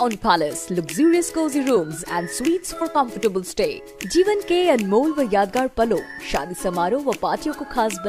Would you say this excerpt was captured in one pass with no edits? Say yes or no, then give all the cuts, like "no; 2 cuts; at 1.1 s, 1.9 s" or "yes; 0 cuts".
yes; 0 cuts